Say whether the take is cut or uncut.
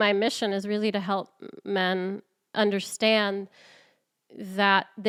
uncut